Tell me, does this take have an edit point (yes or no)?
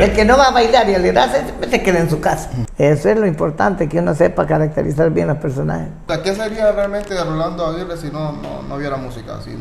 yes